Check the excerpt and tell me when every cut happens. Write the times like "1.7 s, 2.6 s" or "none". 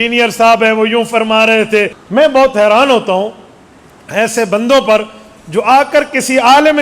2.0 s